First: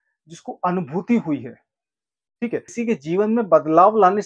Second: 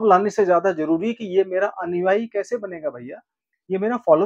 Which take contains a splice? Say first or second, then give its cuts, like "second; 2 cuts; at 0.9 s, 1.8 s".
first; 1 cut; at 2.7 s